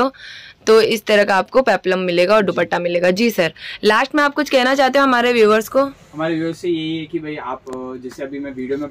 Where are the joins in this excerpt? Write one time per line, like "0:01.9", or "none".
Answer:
none